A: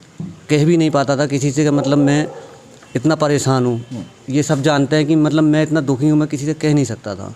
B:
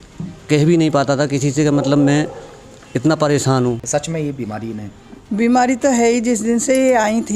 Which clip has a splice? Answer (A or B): B